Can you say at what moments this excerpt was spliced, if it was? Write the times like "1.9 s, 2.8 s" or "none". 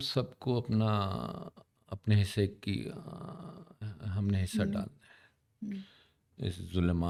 none